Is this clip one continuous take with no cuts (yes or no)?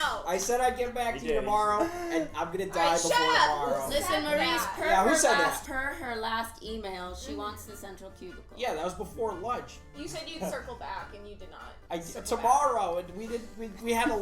no